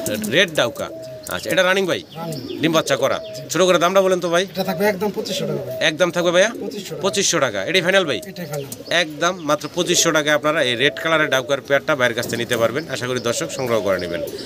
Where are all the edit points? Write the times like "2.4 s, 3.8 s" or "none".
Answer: none

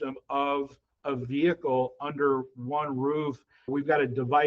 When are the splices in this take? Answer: 3.5 s

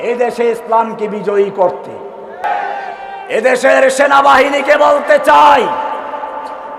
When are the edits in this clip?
2.4 s

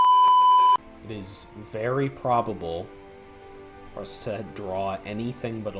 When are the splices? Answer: 1.0 s

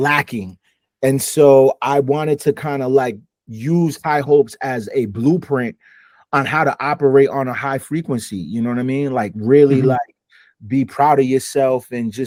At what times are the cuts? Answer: none

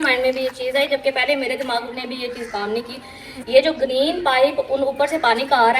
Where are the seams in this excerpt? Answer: none

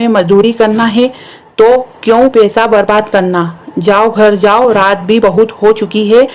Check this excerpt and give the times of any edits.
none

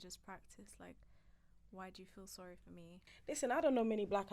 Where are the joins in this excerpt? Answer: 3.1 s

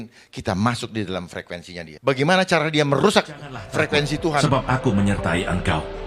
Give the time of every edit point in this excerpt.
4.4 s

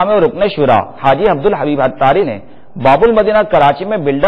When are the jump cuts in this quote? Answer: 0.9 s, 2.3 s

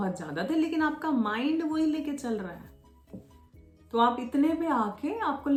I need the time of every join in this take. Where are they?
none

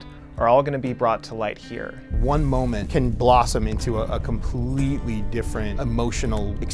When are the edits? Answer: 2.0 s

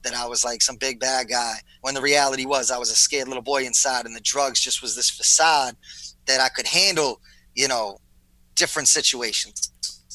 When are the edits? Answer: none

